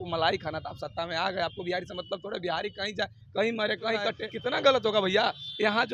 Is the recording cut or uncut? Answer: cut